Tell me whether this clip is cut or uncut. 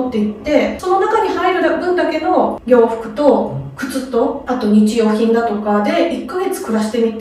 uncut